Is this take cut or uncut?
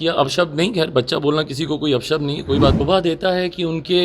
cut